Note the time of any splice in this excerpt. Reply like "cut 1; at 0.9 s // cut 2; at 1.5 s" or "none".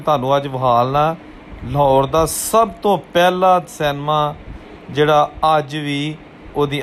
none